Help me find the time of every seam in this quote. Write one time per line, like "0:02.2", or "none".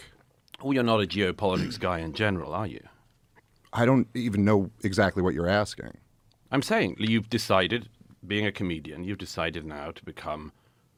none